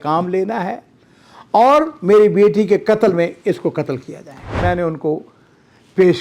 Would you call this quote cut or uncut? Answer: cut